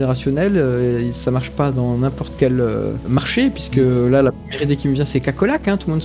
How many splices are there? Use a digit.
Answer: 1